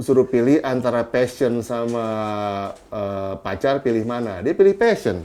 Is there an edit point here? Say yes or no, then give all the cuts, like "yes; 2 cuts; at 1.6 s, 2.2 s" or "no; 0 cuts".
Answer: no; 0 cuts